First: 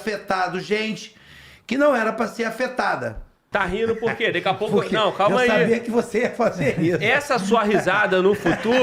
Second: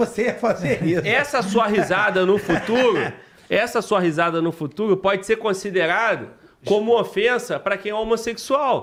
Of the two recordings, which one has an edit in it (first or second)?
first